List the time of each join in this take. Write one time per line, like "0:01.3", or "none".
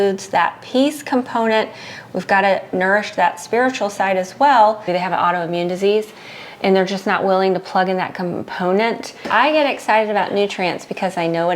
0:04.9
0:09.2